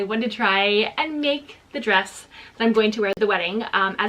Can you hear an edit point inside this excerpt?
yes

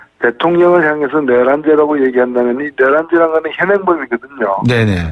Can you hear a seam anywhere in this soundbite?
no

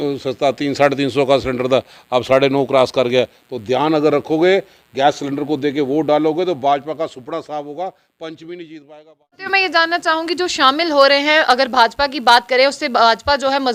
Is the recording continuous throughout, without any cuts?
no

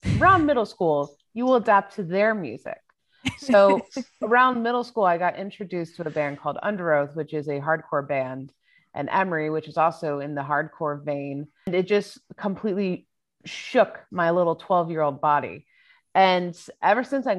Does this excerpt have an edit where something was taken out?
yes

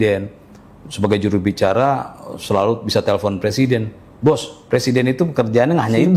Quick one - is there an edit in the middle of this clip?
no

